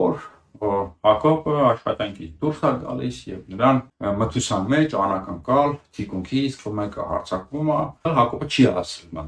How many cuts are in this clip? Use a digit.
3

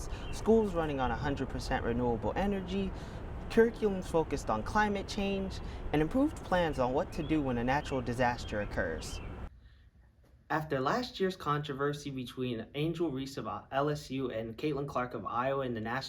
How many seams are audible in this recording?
1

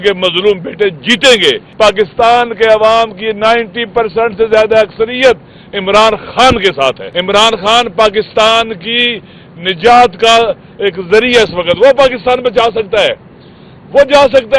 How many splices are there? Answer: 2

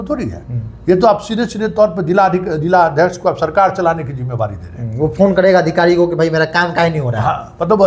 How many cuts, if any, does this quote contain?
0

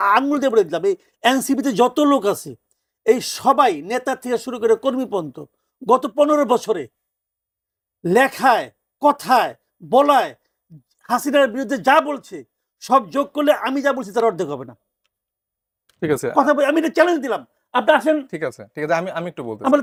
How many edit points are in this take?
0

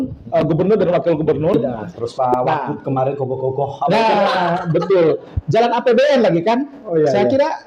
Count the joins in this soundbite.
1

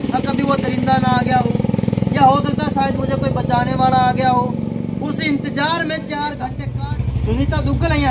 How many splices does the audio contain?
1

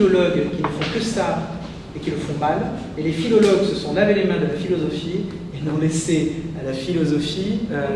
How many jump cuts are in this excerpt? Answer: 1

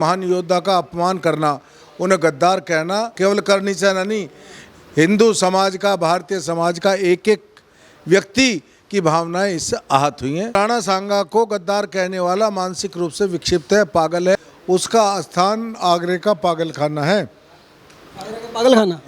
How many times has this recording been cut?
3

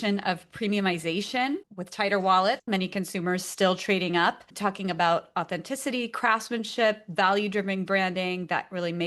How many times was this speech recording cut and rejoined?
2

